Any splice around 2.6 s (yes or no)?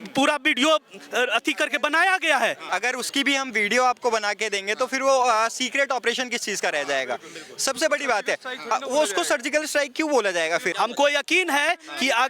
yes